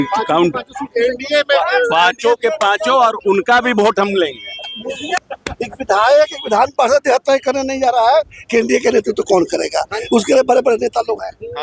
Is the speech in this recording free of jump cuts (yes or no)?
no